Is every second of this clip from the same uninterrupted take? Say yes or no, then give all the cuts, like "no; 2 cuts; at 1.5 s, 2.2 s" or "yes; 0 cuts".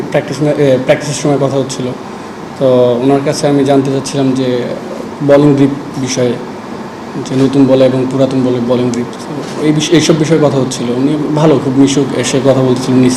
yes; 0 cuts